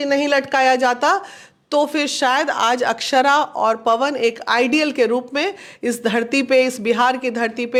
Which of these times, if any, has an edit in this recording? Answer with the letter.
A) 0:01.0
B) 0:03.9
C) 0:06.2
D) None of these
D